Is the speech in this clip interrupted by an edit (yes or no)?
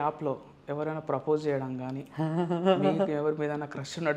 no